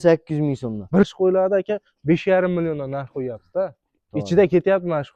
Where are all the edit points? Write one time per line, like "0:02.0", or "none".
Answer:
0:01.0